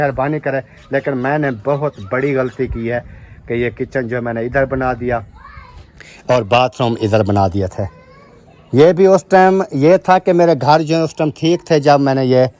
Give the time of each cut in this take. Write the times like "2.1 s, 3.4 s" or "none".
none